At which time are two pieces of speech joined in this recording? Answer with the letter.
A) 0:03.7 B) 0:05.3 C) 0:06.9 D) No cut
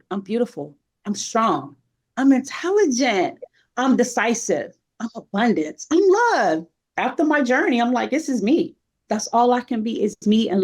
C